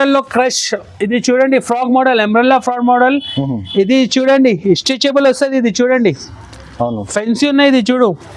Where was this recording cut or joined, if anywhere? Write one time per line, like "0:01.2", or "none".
none